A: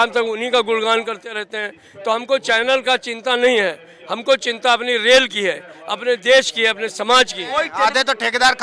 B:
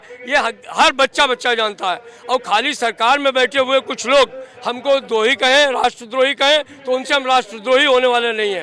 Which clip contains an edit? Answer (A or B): A